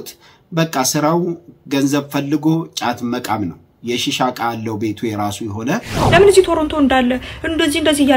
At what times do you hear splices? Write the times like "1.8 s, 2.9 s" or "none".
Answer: 5.9 s

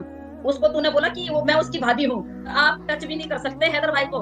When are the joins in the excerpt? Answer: 2.6 s

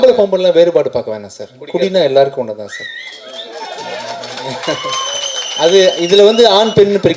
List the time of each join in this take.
none

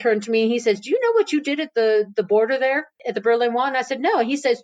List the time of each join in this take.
3.0 s

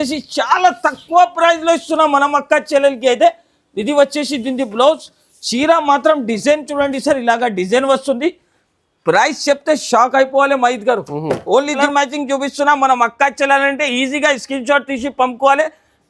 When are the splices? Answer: 11.8 s

